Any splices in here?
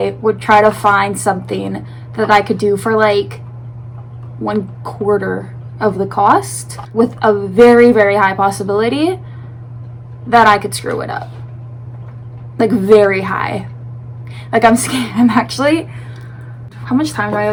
no; 0 cuts

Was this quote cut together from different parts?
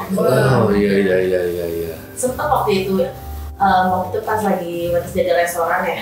no; 0 cuts

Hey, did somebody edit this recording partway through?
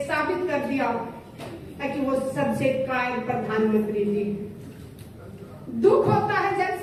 no; 0 cuts

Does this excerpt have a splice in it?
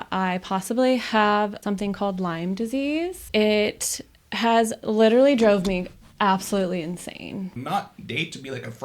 yes; 3 cuts; at 1.6 s, 3.2 s, 7.5 s

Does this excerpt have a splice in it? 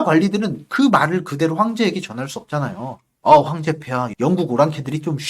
yes; 1 cut; at 4.1 s

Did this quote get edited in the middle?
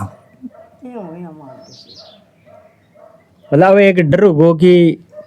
no; 0 cuts

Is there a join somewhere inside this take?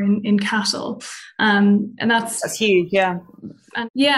no; 0 cuts

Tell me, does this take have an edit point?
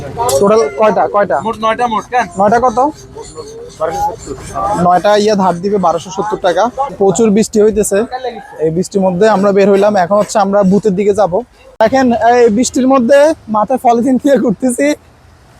yes; 2 cuts; at 6.9 s, 11.6 s

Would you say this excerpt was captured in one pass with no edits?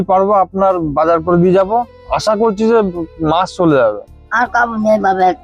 no; 1 cut; at 4.2 s

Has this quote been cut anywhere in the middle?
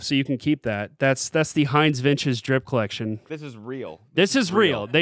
no; 0 cuts

